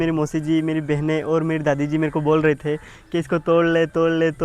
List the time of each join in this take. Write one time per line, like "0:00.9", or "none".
none